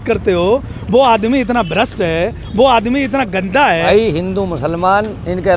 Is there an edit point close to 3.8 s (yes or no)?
yes